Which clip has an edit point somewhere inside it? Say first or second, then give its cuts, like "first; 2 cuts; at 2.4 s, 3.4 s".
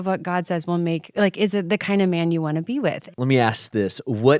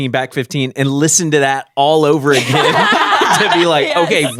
first; 1 cut; at 3.0 s